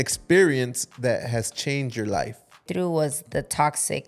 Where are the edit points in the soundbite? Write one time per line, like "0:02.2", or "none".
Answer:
0:02.6